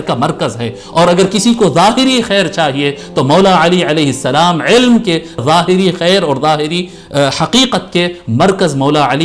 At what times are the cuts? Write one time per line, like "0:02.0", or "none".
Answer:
0:05.4